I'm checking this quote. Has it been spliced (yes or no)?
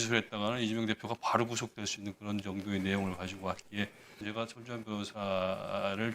yes